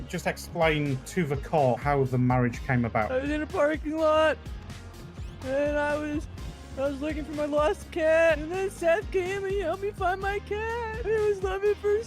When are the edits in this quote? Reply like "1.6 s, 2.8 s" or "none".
1.8 s